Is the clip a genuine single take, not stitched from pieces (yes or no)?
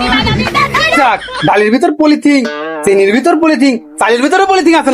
no